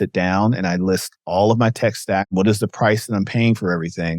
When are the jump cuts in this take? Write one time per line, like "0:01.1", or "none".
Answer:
0:02.3